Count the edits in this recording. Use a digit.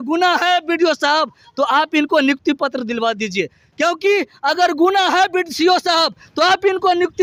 0